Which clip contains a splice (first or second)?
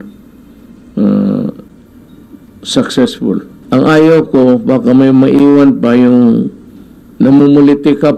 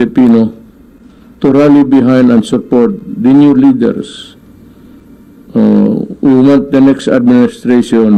first